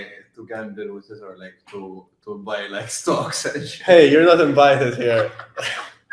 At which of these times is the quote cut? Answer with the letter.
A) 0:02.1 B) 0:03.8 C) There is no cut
C